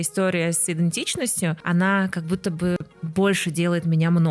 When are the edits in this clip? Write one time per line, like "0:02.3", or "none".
0:01.6
0:03.0